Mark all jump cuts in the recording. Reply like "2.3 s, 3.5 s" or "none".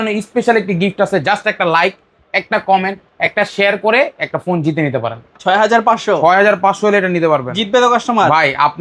5.4 s